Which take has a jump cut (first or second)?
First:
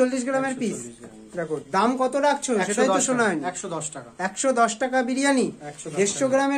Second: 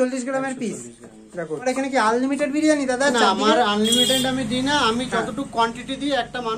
second